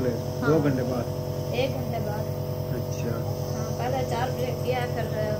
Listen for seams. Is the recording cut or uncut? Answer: uncut